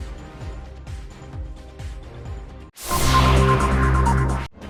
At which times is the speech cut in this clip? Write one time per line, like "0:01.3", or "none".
none